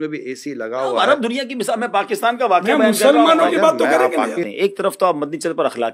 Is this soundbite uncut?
no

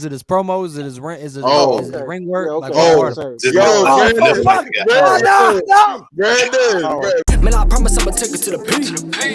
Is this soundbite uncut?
no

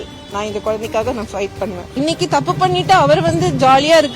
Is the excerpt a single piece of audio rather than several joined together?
no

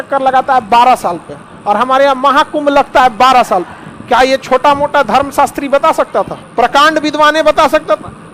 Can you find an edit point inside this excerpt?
no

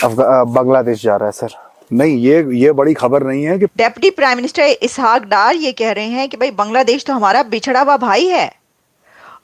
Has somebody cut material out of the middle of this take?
yes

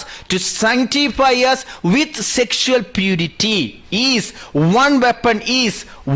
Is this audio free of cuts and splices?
yes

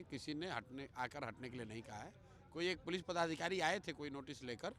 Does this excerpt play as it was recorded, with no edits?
yes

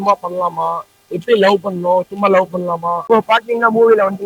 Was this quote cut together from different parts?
no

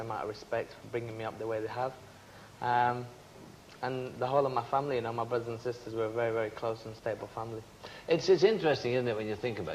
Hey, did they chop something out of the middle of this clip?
no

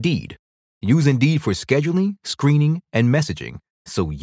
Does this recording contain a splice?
no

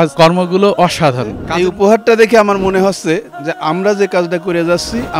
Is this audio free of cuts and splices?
no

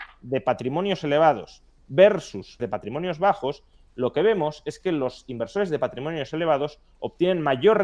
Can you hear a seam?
yes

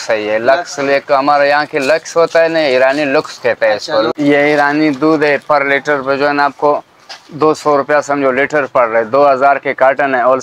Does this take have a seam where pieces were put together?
yes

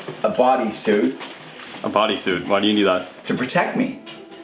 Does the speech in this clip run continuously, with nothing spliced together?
no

